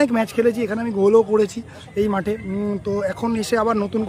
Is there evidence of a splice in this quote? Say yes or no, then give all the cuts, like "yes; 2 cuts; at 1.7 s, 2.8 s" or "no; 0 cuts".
no; 0 cuts